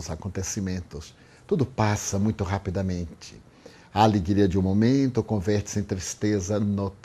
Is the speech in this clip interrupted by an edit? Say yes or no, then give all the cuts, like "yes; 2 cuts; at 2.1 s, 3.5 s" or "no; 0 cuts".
no; 0 cuts